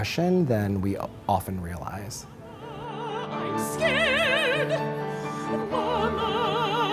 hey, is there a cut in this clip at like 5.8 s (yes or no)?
no